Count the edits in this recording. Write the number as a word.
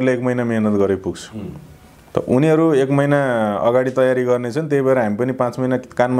zero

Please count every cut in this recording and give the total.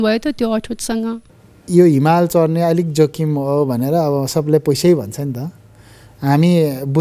one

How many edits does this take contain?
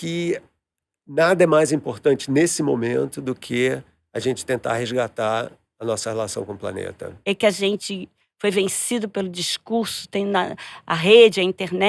one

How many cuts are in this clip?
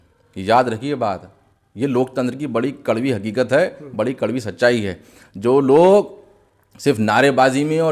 zero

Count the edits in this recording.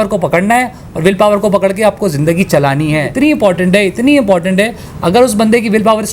one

